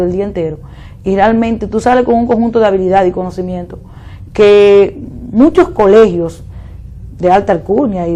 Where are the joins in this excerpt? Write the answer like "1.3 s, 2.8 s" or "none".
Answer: 2.6 s